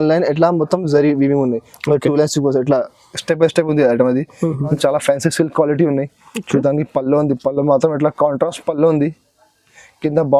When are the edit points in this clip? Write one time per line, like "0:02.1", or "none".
0:04.7